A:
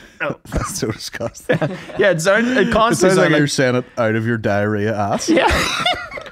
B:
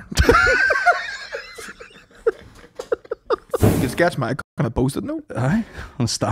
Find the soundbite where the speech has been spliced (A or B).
B